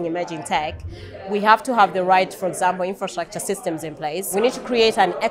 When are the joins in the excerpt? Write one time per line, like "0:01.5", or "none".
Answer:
0:04.3